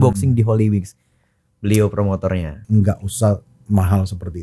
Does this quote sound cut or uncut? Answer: cut